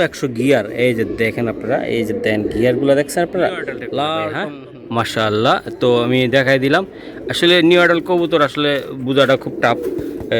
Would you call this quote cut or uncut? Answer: cut